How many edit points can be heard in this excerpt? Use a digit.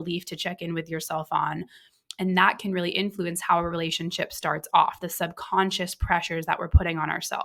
0